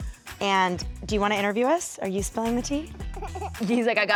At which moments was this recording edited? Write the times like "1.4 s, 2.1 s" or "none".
none